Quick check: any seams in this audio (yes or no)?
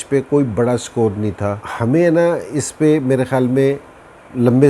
yes